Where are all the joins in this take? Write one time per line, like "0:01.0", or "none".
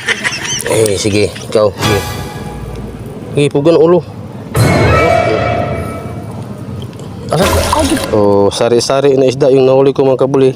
0:07.4